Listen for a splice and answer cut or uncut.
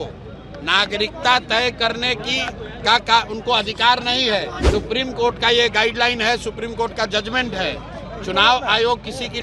cut